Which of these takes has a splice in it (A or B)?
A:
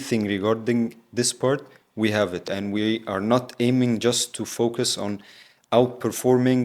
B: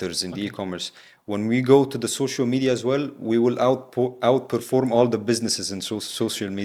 A